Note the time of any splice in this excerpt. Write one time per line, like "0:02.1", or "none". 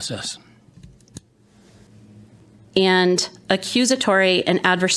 0:01.9